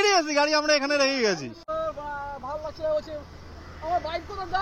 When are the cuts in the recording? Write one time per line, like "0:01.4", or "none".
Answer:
0:01.5